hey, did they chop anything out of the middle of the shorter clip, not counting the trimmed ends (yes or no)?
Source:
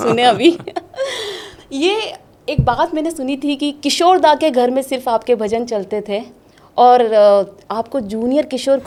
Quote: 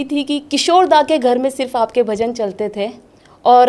no